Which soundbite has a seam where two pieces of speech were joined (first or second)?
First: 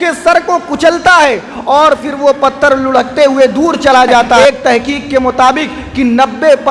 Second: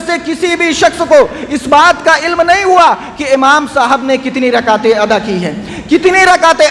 first